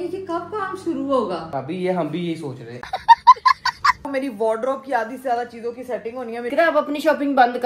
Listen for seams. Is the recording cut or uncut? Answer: cut